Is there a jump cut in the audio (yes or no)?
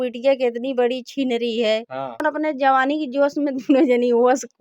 yes